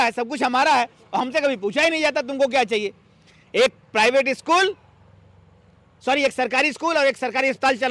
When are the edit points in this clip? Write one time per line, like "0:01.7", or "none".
none